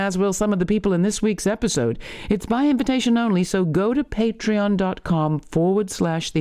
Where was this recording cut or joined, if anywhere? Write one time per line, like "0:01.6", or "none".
none